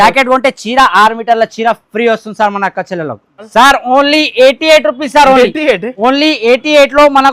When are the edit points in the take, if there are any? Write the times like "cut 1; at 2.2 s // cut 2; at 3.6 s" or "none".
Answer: cut 1; at 3.5 s